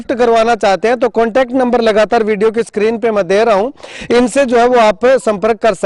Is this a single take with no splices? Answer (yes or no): yes